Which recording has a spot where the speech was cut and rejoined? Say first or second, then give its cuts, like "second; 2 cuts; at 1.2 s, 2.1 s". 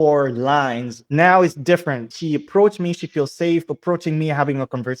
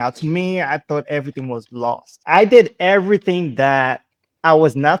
first; 2 cuts; at 0.9 s, 2.1 s